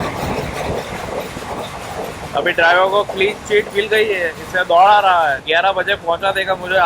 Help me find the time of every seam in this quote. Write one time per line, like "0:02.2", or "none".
0:05.4